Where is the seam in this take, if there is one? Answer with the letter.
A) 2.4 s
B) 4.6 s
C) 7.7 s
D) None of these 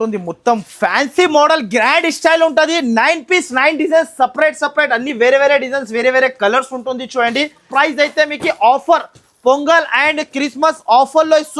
C